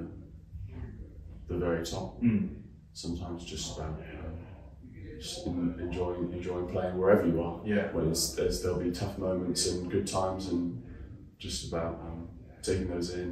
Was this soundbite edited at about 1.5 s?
no; 0 cuts

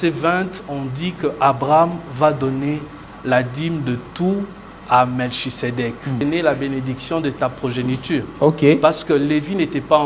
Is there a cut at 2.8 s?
no; 1 cut; at 6.2 s

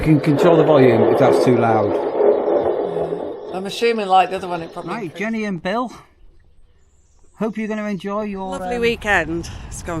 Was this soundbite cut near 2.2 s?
no; 2 cuts; at 4.9 s, 8.6 s

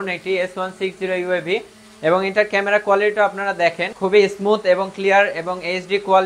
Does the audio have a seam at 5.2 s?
no; 1 cut; at 3.9 s

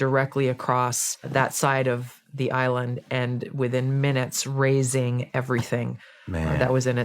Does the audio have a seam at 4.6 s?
no; 1 cut; at 1.2 s

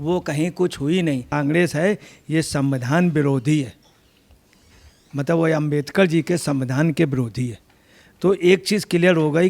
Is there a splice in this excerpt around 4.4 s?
no; 1 cut; at 1.3 s

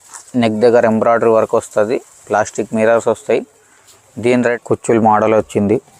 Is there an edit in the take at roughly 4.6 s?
yes; 1 cut; at 4.6 s

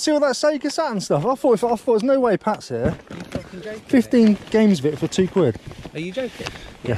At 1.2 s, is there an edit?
no; 0 cuts

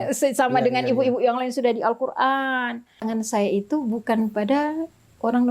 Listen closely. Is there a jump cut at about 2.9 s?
yes; 1 cut; at 2.9 s

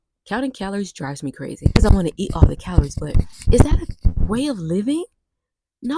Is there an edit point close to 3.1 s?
no; 1 cut; at 1.8 s

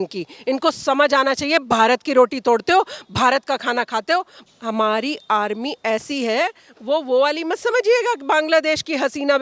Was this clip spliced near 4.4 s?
yes; 1 cut; at 4.4 s

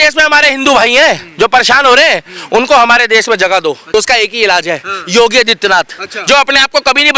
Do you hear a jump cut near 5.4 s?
no; 1 cut; at 3.8 s

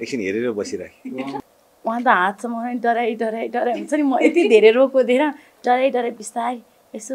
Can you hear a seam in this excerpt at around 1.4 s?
yes; 1 cut; at 1.4 s

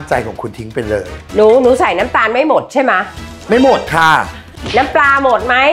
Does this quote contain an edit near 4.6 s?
yes; 2 cuts; at 1.2 s, 4.6 s

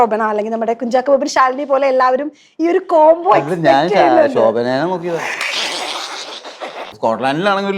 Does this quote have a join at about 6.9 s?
yes; 1 cut; at 6.9 s

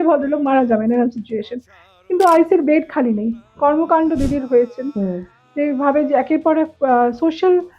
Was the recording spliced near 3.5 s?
yes; 1 cut; at 3.5 s

